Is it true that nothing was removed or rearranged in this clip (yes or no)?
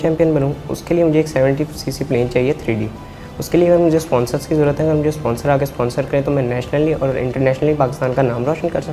yes